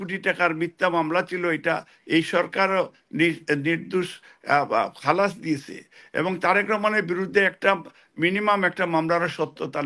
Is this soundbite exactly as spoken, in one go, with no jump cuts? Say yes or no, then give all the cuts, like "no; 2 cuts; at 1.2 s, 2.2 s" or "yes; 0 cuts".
yes; 0 cuts